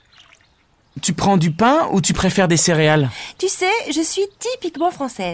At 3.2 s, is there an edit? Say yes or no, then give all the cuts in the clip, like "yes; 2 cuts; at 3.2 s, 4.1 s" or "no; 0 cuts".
yes; 1 cut; at 3.2 s